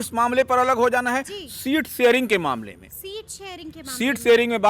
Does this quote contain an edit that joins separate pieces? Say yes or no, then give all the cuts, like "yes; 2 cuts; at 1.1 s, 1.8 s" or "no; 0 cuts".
no; 0 cuts